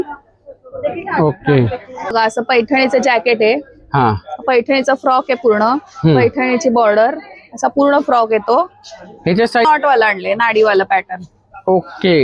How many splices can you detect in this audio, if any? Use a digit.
2